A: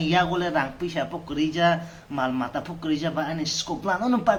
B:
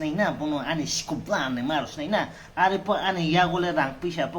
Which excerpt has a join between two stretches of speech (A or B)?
B